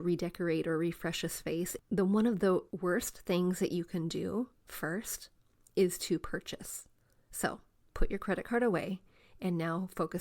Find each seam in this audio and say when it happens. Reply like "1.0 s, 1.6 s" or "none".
1.7 s, 2.7 s